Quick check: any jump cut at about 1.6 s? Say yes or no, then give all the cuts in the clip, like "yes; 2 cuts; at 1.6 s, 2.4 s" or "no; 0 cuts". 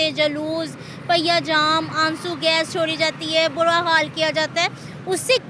no; 0 cuts